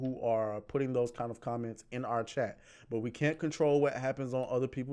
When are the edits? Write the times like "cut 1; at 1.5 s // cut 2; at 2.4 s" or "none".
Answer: none